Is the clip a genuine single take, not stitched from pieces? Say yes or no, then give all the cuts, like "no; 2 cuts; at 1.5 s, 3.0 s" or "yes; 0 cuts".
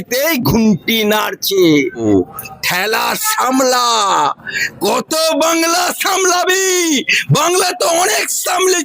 no; 1 cut; at 2.0 s